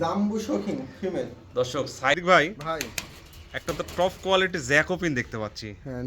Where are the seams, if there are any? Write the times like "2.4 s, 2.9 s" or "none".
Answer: 2.1 s